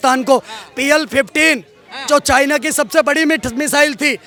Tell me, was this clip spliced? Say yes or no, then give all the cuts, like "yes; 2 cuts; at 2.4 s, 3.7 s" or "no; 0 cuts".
no; 0 cuts